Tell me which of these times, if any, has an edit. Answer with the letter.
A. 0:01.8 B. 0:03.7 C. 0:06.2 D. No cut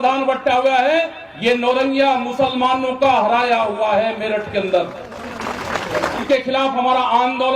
C